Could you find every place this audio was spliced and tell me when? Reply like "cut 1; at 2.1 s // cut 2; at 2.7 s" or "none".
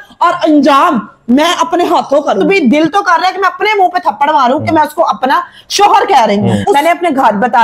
cut 1; at 2.4 s // cut 2; at 6.7 s